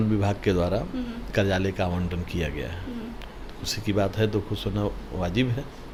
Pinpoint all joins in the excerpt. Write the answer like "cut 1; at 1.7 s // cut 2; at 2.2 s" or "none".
none